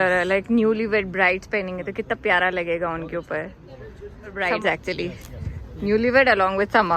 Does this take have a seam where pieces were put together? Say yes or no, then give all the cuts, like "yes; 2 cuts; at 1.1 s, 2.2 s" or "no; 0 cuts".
yes; 1 cut; at 4.4 s